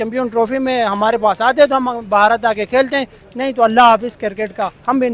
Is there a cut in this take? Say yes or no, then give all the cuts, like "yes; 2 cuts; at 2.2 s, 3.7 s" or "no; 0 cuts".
no; 0 cuts